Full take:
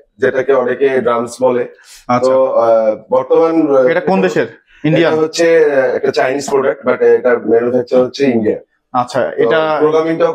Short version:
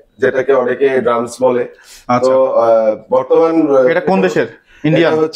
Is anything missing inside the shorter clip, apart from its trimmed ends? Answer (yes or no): no